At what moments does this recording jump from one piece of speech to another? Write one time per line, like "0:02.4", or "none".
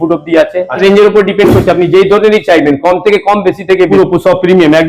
0:00.8
0:03.9